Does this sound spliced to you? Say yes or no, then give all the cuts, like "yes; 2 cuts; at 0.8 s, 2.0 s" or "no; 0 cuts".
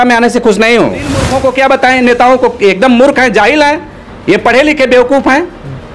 yes; 1 cut; at 1.3 s